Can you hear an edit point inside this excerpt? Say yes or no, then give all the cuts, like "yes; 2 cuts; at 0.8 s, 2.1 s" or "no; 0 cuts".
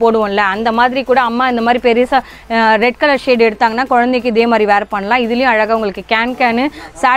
no; 0 cuts